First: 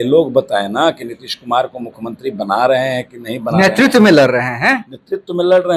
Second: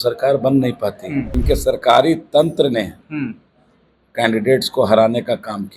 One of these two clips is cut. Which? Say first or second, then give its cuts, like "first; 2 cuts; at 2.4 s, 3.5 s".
second; 1 cut; at 1.3 s